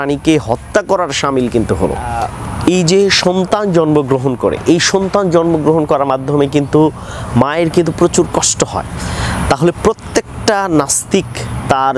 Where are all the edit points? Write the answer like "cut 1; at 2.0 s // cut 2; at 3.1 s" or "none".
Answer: cut 1; at 2.3 s

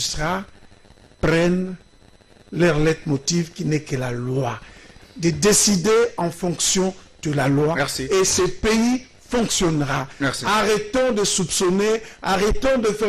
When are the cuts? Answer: none

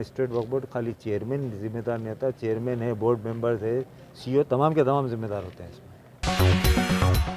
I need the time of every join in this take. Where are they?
cut 1; at 6.2 s

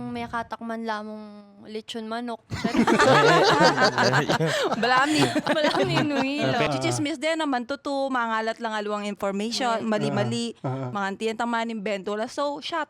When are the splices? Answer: cut 1; at 6.7 s

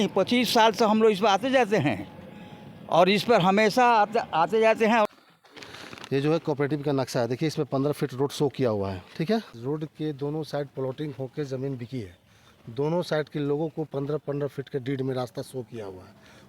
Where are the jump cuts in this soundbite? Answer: cut 1; at 5.1 s // cut 2; at 9.5 s

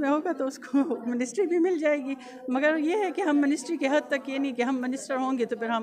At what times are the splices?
none

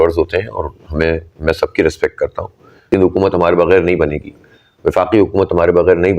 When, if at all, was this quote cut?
cut 1; at 2.7 s

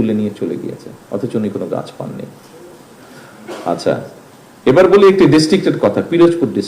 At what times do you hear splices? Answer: none

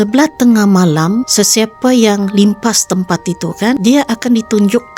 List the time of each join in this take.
cut 1; at 1.3 s // cut 2; at 3.8 s

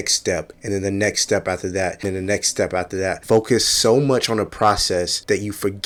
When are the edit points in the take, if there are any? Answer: none

